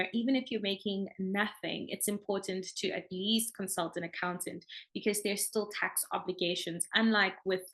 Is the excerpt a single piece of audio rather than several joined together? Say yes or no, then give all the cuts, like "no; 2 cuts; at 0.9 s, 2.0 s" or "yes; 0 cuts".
yes; 0 cuts